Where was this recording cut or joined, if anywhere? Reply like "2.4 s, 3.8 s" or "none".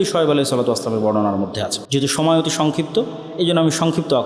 1.8 s